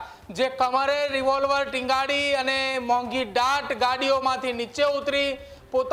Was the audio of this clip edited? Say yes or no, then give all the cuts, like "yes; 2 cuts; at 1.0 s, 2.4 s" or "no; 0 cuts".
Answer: no; 0 cuts